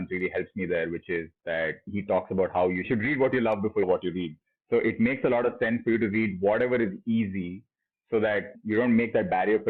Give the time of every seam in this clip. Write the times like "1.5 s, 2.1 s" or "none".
none